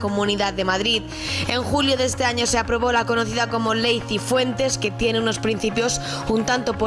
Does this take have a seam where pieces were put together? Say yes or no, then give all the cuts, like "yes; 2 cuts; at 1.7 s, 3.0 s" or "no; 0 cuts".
no; 0 cuts